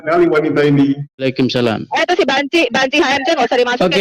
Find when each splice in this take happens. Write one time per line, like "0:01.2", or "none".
0:01.2